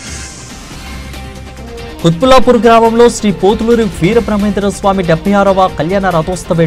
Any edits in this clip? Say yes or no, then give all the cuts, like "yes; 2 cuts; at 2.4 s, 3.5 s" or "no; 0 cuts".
yes; 1 cut; at 1.1 s